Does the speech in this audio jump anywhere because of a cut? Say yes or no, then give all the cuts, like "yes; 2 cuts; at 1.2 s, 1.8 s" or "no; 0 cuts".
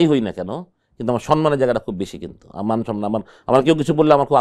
no; 0 cuts